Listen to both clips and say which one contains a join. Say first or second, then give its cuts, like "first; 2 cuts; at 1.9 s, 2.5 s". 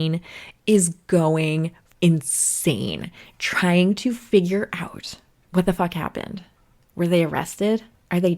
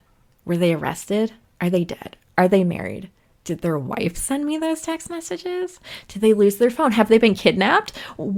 first; 1 cut; at 1.8 s